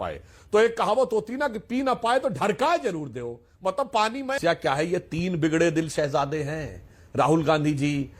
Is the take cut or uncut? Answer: cut